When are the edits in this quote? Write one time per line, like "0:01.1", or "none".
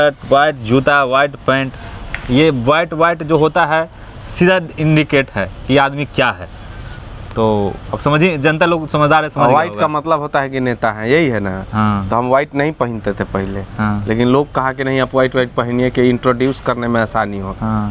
none